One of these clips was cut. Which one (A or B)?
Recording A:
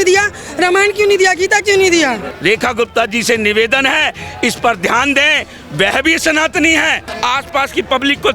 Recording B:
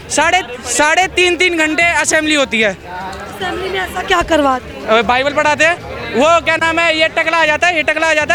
A